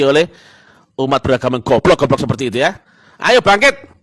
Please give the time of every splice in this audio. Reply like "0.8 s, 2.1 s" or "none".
none